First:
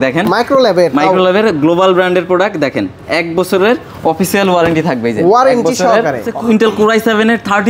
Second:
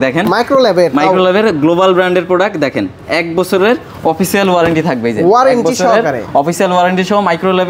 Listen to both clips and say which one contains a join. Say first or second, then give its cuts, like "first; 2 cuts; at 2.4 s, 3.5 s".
first; 1 cut; at 6.3 s